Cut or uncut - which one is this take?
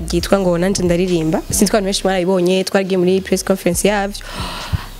uncut